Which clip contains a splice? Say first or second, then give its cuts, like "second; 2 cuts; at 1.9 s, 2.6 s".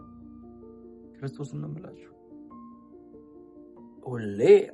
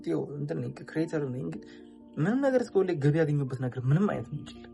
first; 2 cuts; at 2.5 s, 3.9 s